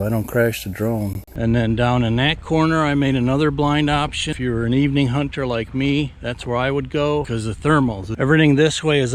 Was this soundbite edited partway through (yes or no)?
yes